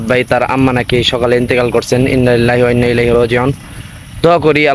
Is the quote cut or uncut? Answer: uncut